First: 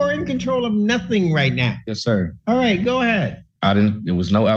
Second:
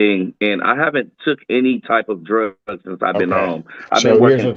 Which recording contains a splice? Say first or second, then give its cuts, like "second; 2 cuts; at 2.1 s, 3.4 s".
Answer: first; 1 cut; at 3.5 s